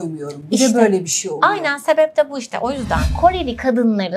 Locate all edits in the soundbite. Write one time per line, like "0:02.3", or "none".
0:03.1